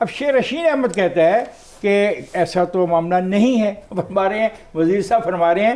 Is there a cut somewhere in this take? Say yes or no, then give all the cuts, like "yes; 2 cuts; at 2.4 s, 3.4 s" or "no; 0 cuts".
yes; 1 cut; at 3.9 s